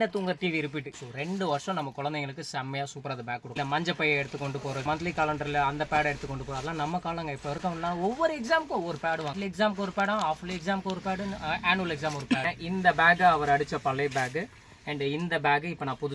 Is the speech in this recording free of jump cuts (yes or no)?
no